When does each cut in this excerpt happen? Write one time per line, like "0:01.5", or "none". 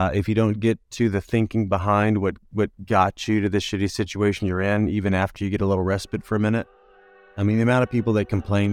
none